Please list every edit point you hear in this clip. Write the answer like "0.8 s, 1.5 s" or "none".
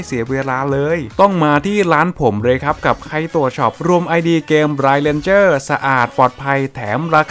none